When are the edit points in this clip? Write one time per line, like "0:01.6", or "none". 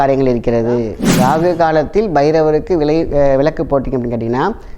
0:01.0